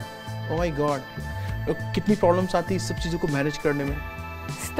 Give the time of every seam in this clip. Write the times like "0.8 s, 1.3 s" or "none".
1.1 s